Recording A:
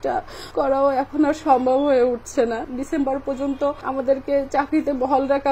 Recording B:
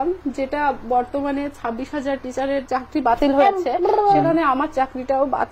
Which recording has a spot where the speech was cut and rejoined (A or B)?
A